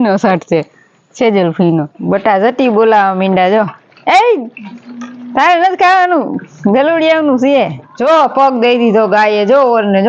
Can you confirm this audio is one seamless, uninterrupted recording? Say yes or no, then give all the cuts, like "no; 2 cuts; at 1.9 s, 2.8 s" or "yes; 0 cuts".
no; 2 cuts; at 1.9 s, 7.8 s